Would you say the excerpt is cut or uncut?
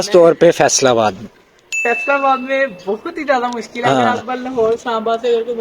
uncut